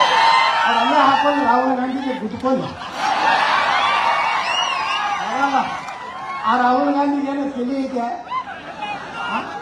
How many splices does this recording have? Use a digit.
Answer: 0